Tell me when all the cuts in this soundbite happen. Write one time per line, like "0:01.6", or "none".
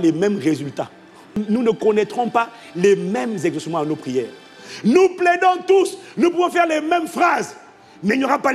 none